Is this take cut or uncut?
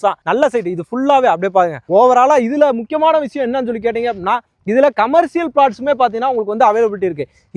uncut